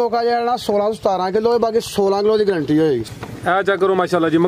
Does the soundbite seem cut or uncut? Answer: cut